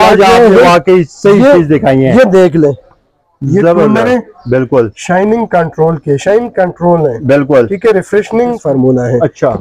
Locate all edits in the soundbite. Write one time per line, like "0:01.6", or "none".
0:08.6

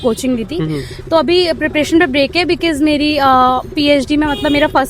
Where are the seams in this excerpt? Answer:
none

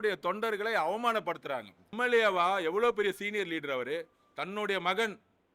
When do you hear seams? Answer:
0:01.9

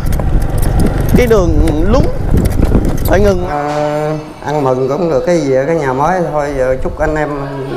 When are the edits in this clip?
0:03.5

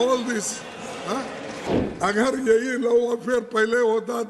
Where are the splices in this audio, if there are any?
0:01.7

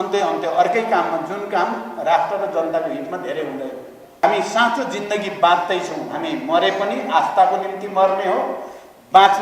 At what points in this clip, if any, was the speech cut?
0:04.2

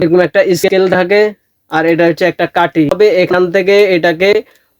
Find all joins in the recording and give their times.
0:02.9

